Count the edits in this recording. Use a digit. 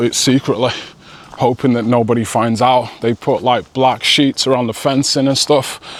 0